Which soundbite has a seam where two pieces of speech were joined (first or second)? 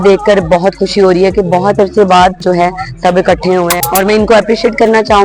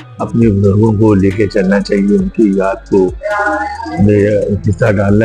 first